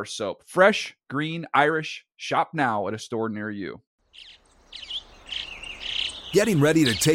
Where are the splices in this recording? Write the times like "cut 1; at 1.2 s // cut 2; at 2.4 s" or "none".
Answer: cut 1; at 3.9 s